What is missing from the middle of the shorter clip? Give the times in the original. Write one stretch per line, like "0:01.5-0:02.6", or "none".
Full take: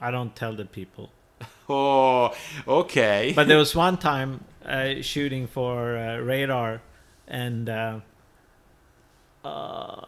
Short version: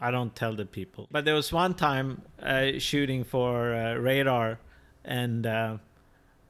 0:01.1-0:03.3

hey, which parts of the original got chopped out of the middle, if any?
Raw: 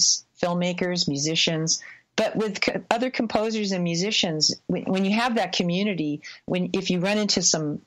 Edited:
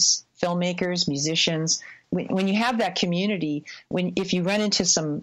0:02.0-0:04.5

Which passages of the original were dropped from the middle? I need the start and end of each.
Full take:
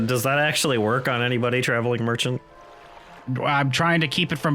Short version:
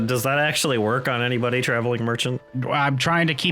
0:02.5-0:03.2

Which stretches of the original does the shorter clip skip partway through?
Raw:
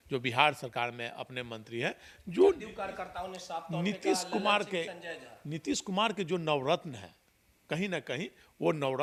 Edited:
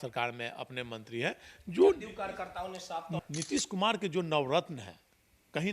0:03.7-0:05.3

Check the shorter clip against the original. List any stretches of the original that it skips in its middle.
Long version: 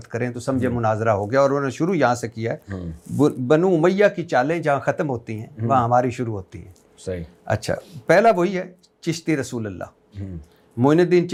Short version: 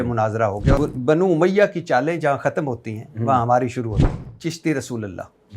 0:01.4-0:03.2
0:06.6-0:08.8

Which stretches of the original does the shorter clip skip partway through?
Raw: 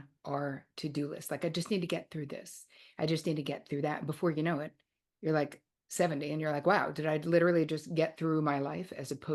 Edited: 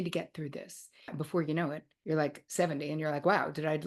0:02.9-0:04.0
0:05.1-0:05.6

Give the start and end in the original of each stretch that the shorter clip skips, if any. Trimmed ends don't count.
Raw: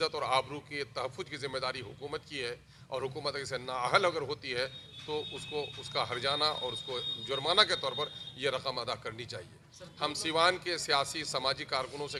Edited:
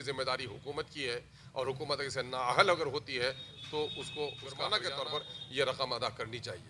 0:06.0-0:07.5

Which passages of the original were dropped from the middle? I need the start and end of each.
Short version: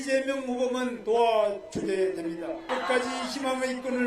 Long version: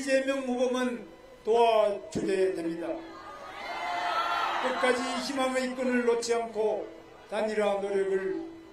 0:01.0-0:01.4
0:03.1-0:04.6

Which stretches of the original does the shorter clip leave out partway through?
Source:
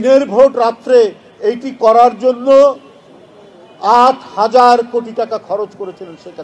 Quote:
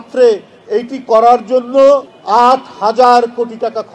0:02.9-0:03.7

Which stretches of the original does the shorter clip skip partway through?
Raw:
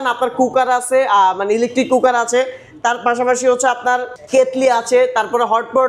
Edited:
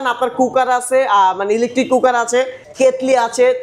0:02.6-0:04.2

